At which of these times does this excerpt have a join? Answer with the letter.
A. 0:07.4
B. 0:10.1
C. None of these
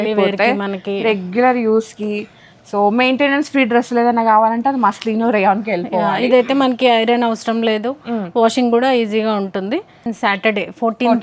B